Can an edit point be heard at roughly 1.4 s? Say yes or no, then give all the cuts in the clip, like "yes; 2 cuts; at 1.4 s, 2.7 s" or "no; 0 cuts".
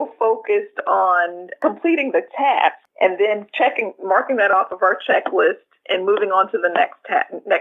yes; 2 cuts; at 1.4 s, 2.9 s